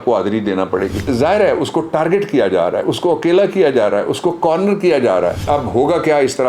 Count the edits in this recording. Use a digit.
2